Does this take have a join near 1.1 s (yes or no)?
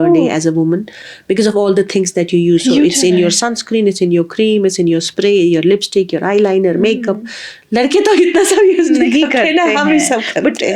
no